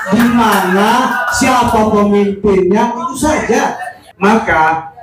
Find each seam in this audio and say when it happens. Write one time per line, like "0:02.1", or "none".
0:04.0